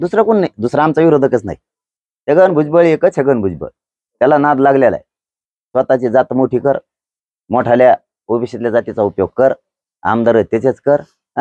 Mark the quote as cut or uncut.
uncut